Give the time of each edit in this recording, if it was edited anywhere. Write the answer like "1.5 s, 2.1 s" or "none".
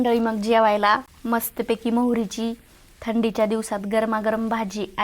1.1 s